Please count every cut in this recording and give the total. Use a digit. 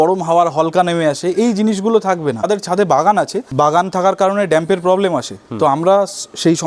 2